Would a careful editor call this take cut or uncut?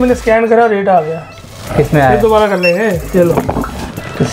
uncut